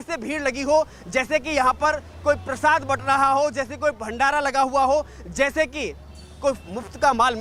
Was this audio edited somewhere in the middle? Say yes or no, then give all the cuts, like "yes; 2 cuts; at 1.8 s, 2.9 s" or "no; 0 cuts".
no; 0 cuts